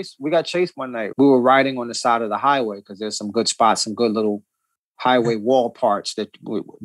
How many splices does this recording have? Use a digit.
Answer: 1